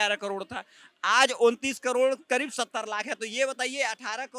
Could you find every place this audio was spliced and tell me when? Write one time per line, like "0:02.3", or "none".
none